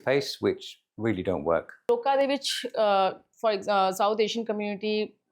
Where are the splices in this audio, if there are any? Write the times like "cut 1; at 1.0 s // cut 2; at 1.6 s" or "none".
cut 1; at 1.9 s